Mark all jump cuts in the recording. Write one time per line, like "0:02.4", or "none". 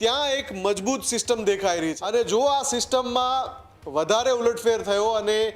0:02.0

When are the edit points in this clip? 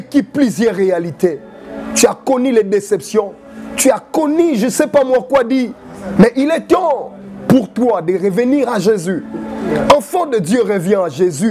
none

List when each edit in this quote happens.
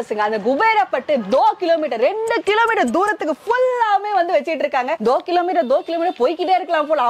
none

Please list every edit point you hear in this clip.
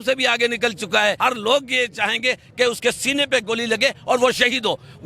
0:01.2

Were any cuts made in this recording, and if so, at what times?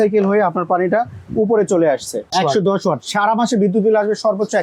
0:02.3

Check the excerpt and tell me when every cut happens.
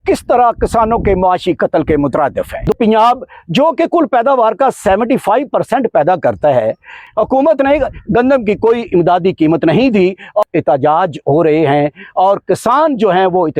0:02.7
0:07.0
0:10.4

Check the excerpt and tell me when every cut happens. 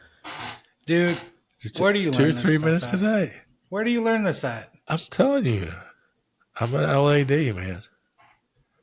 none

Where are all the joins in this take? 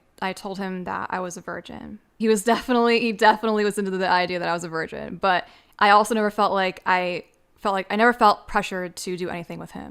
0:02.1

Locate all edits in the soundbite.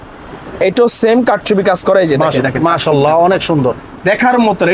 0:02.4

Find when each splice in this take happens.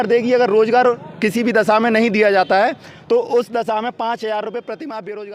none

